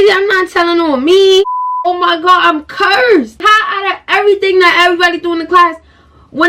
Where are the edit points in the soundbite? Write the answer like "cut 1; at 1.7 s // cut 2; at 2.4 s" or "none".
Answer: cut 1; at 1.9 s